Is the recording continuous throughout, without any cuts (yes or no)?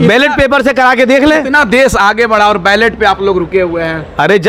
yes